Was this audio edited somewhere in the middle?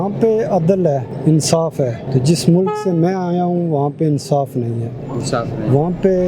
yes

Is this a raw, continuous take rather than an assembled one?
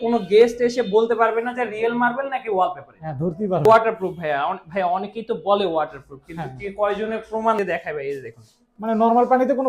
no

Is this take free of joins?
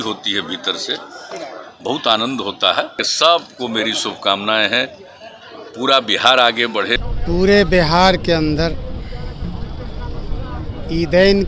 no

